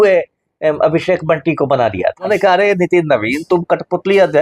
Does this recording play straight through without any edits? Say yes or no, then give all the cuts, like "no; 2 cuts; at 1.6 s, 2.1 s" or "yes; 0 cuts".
no; 1 cut; at 2.3 s